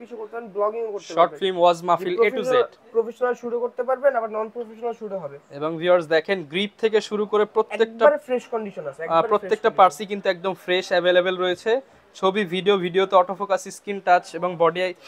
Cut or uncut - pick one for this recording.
uncut